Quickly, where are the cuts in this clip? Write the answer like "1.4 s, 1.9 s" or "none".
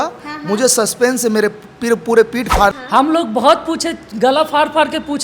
2.8 s